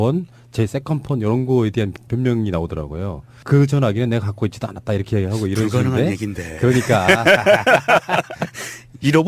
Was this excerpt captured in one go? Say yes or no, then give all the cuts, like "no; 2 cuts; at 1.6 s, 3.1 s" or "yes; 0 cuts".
no; 1 cut; at 5.7 s